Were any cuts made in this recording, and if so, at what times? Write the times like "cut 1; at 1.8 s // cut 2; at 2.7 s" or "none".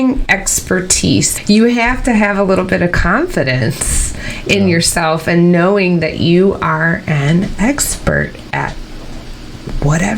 cut 1; at 1.3 s